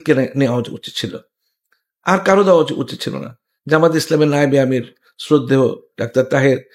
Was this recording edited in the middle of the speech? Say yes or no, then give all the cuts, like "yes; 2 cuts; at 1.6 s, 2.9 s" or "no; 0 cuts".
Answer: no; 0 cuts